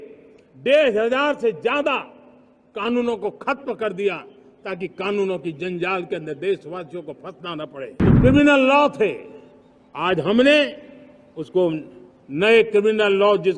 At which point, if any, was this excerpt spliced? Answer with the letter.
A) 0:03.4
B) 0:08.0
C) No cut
B